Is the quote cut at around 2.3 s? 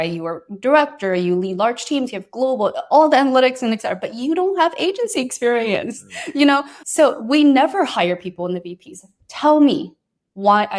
no; 1 cut; at 6.8 s

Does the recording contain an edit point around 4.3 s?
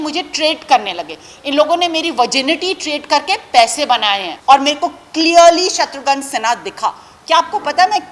yes; 1 cut; at 4.3 s

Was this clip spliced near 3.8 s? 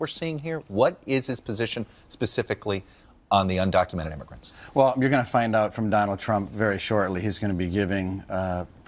no; 1 cut; at 5.4 s

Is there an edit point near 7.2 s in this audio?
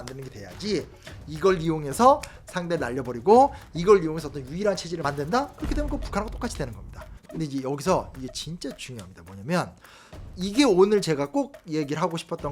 yes; 1 cut; at 7.2 s

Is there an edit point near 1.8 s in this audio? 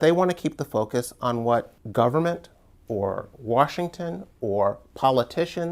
yes; 1 cut; at 1.8 s

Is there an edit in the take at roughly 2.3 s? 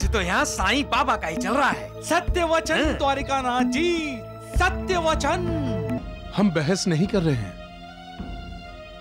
no; 1 cut; at 6.1 s

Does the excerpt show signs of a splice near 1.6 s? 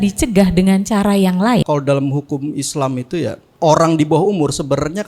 yes; 2 cuts; at 1.6 s, 3.5 s

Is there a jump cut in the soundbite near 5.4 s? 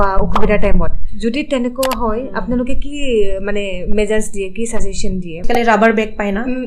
yes; 2 cuts; at 1.0 s, 5.4 s

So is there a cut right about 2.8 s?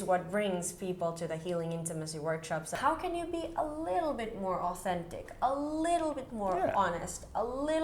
yes; 1 cut; at 2.8 s

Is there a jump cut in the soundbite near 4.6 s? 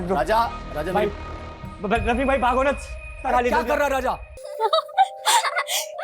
yes; 1 cut; at 4.6 s

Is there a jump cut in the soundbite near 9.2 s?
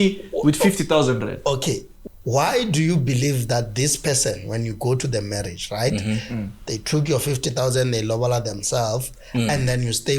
no; 1 cut; at 1.9 s

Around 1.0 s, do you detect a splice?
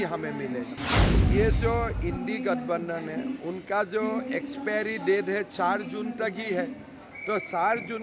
yes; 1 cut; at 1.0 s

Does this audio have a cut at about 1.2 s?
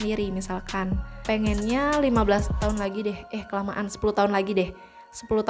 yes; 1 cut; at 1.2 s

